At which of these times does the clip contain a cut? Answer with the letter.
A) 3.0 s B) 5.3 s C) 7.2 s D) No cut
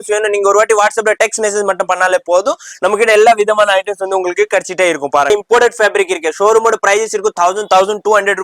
B